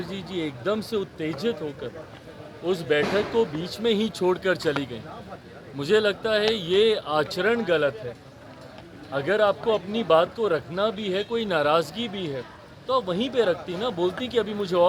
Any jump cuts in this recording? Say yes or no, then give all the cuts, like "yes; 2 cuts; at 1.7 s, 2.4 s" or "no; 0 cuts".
no; 0 cuts